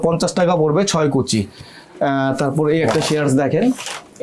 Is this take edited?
no; 0 cuts

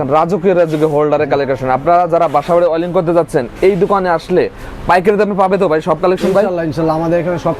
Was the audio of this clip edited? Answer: no; 0 cuts

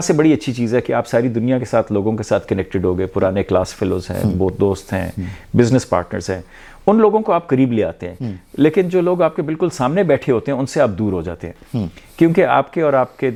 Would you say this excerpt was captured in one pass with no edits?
yes; 0 cuts

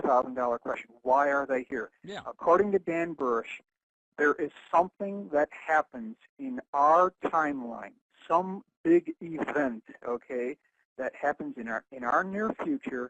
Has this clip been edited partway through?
yes; 1 cut; at 7.1 s

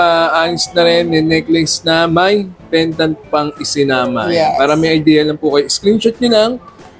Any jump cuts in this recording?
no; 0 cuts

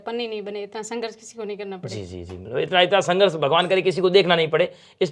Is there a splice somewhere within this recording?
no; 0 cuts

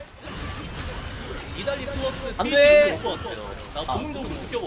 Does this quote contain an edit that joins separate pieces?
no; 0 cuts

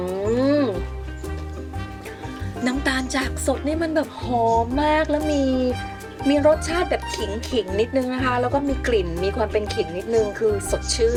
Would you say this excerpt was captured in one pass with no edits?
yes; 0 cuts

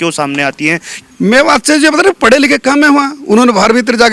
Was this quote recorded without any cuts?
yes; 0 cuts

